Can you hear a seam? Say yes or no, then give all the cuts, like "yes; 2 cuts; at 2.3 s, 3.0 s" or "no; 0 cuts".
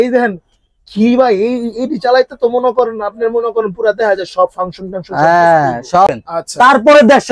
yes; 1 cut; at 6.1 s